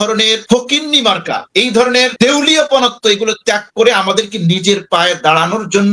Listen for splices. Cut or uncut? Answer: uncut